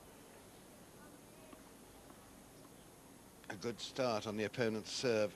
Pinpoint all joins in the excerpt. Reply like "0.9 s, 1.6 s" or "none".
none

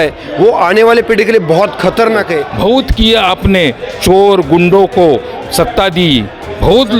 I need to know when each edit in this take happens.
2.4 s

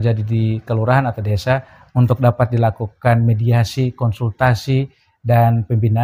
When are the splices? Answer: none

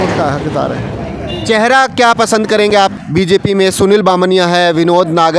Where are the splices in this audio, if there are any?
3.0 s

